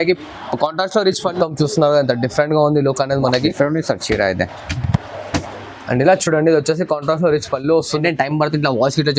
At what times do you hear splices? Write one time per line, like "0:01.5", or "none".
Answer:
0:01.3
0:07.9